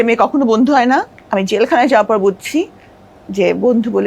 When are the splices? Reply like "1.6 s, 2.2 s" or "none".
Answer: 1.2 s